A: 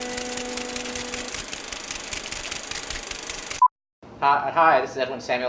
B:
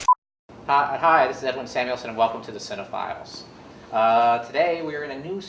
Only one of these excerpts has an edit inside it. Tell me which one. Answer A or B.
B